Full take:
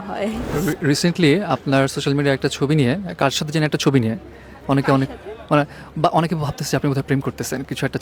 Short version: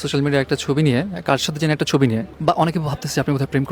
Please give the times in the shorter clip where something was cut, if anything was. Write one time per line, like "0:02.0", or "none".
0:02.3